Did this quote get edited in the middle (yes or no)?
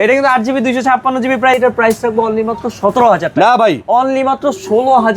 yes